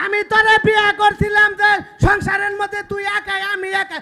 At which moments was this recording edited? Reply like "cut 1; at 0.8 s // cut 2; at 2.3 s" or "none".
none